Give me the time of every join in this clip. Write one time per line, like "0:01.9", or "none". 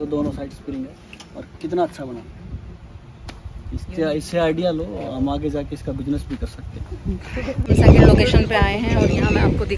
0:07.6